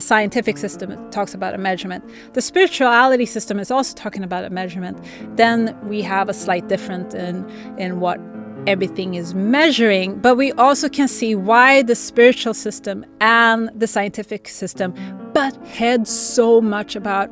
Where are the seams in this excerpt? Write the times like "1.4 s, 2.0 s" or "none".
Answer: none